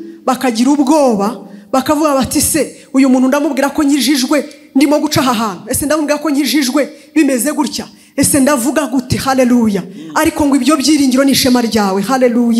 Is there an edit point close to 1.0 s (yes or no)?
no